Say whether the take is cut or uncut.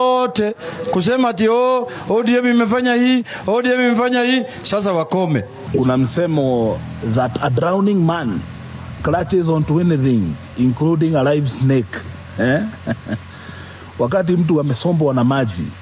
cut